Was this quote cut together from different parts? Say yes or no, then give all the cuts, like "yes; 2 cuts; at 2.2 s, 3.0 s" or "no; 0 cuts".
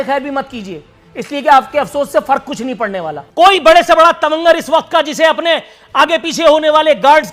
yes; 1 cut; at 3.2 s